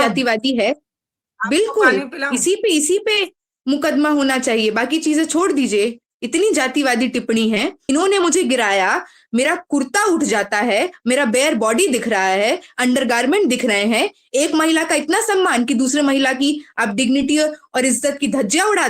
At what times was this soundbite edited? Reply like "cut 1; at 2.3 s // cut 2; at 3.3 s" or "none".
cut 1; at 7.8 s